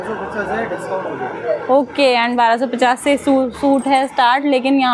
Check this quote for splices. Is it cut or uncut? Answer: uncut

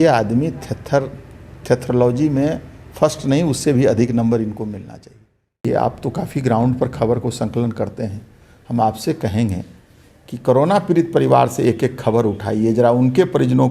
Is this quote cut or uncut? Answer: cut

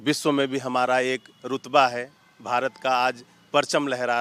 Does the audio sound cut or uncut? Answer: uncut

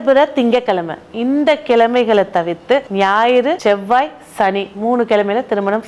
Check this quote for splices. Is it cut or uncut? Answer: cut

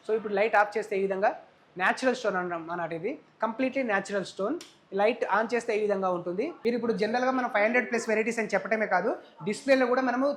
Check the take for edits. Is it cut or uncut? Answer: cut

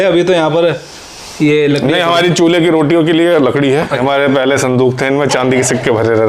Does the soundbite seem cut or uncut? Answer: cut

